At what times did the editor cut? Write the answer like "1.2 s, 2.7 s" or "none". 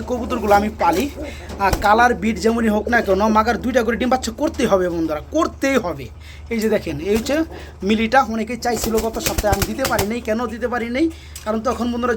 none